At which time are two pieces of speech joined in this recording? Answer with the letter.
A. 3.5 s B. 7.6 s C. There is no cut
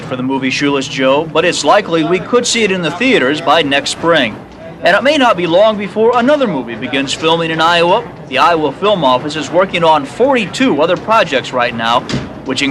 B